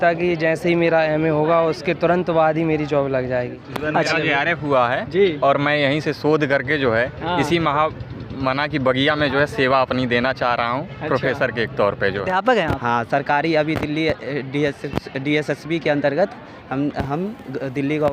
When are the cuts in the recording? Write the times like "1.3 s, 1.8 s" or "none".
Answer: 3.7 s, 12.3 s

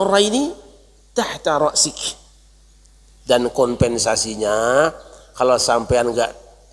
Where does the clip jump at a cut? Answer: none

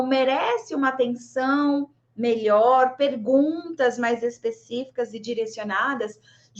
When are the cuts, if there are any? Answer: none

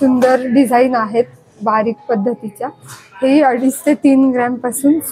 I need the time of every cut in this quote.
none

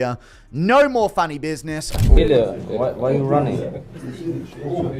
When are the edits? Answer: 1.9 s

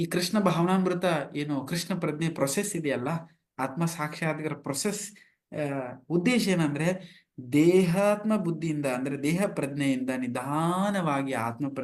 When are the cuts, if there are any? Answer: none

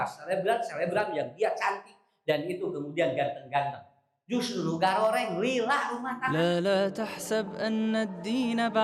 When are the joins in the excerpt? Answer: 6.4 s

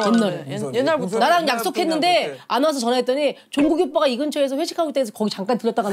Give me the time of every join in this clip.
none

